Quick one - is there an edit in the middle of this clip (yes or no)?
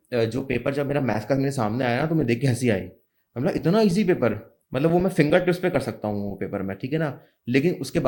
no